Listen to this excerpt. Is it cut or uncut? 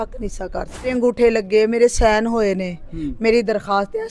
cut